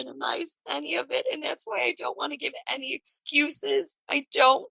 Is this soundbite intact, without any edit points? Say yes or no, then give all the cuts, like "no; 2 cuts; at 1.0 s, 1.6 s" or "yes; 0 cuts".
yes; 0 cuts